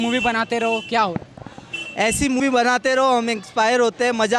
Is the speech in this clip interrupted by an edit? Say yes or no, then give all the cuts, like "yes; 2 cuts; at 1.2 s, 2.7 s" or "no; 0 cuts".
yes; 1 cut; at 2.4 s